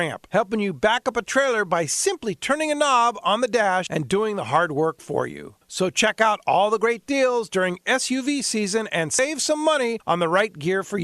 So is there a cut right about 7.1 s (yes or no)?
no